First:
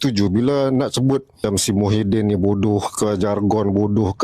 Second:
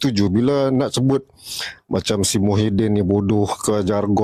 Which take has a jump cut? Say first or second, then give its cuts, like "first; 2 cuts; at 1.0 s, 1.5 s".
first; 1 cut; at 1.4 s